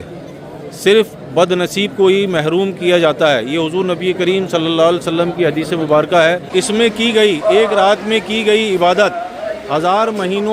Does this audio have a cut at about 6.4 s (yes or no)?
yes